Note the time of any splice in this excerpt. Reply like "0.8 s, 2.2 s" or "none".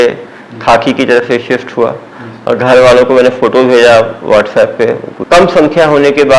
5.1 s